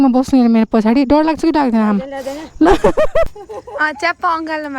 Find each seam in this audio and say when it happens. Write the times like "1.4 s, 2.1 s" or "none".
3.3 s